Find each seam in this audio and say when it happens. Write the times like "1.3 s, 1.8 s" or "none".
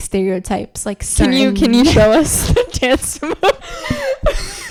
none